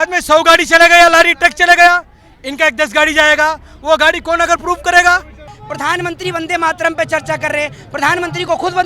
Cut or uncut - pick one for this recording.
cut